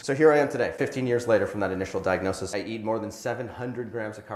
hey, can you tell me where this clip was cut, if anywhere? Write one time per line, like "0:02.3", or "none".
0:02.5